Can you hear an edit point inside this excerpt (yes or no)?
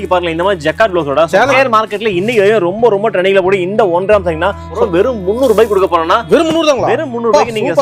yes